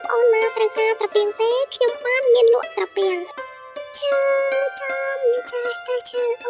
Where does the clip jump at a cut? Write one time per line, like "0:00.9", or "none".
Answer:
0:03.4